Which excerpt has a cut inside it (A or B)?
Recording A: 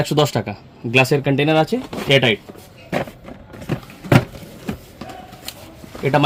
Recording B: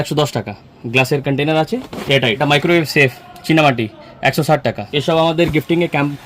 B